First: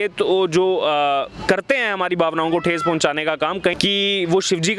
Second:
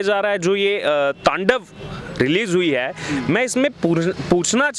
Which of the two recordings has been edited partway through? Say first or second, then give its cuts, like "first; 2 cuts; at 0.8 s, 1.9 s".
first; 1 cut; at 3.8 s